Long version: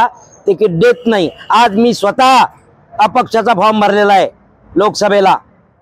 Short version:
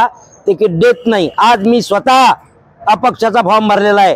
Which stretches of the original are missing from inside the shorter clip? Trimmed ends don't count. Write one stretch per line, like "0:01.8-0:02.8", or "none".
0:01.3-0:01.4

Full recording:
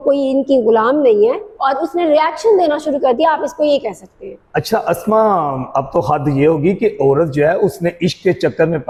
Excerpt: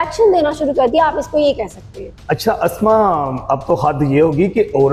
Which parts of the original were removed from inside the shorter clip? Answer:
none

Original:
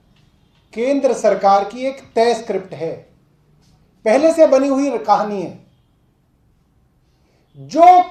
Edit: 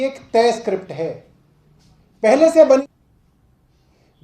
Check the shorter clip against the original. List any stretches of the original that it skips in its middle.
0:04.6-0:06.1

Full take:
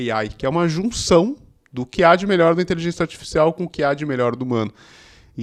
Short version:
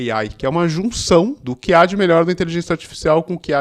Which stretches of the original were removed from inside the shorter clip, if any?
0:01.5-0:01.8

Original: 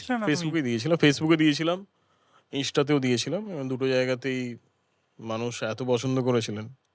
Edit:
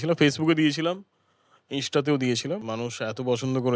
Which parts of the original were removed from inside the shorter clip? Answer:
0:03.4-0:05.2

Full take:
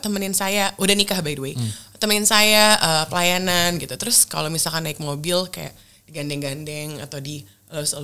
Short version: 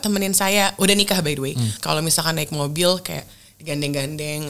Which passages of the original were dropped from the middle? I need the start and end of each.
0:01.7-0:04.2

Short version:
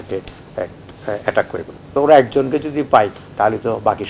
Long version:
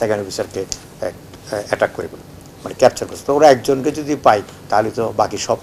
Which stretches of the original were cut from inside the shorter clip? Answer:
0:02.2-0:03.1

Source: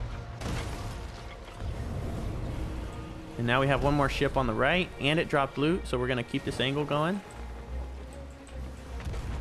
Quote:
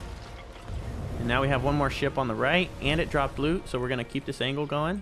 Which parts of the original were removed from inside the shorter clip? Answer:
0:02.1-0:03.4

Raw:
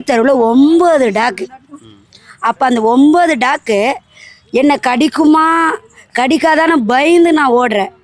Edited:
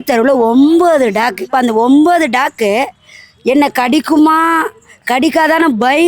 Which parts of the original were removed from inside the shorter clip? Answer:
0:01.5-0:02.6

